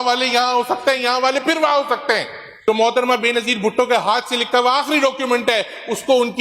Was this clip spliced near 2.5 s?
yes; 1 cut; at 2.5 s

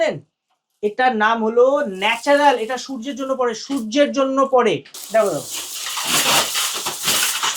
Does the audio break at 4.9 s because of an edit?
yes; 1 cut; at 4.9 s

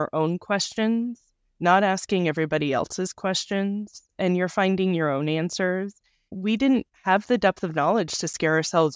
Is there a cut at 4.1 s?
no; 1 cut; at 6.2 s

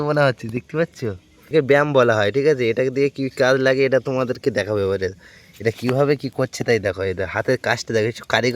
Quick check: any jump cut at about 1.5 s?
yes; 1 cut; at 1.5 s

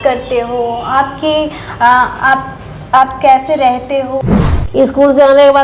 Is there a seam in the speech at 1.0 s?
no; 1 cut; at 4.2 s

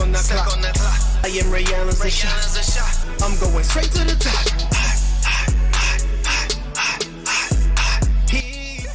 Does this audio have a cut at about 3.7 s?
no; 0 cuts

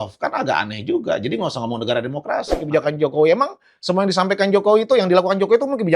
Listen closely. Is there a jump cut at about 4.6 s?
no; 1 cut; at 2.6 s

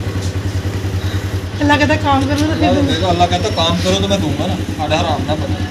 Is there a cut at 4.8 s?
yes; 2 cuts; at 1.5 s, 4.8 s

